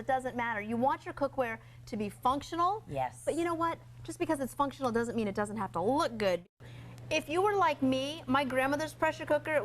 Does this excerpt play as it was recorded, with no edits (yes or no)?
no